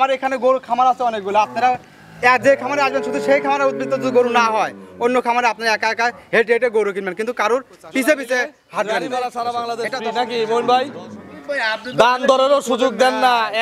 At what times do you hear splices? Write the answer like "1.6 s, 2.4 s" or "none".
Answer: 8.9 s